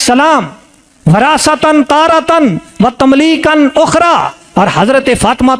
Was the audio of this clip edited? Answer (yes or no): no